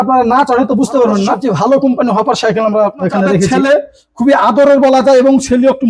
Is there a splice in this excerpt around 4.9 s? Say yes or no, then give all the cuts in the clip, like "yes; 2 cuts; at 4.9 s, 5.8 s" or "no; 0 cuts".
no; 2 cuts; at 1.4 s, 3.5 s